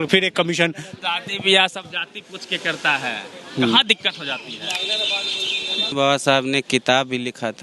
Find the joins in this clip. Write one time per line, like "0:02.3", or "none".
0:01.0
0:05.9